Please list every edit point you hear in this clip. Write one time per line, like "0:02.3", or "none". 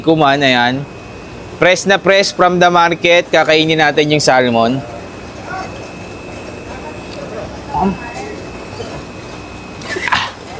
none